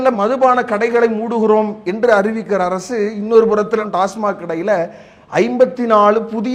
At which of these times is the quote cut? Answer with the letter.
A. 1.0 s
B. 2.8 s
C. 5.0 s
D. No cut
D